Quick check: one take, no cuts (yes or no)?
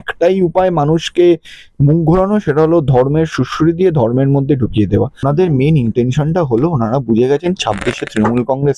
no